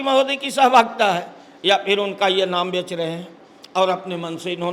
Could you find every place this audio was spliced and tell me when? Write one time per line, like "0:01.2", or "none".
none